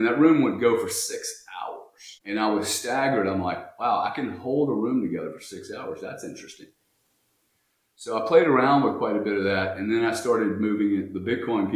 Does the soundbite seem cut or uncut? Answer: uncut